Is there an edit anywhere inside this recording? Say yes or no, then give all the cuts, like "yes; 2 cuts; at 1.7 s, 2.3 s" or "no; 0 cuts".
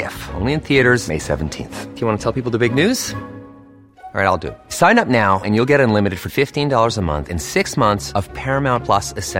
no; 0 cuts